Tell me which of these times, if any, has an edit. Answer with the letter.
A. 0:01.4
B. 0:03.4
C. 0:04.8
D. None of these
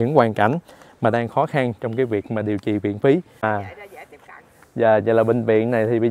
B